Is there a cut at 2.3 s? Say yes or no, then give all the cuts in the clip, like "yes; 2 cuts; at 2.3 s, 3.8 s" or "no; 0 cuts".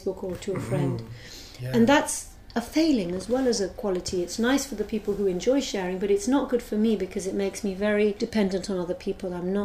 no; 1 cut; at 8.2 s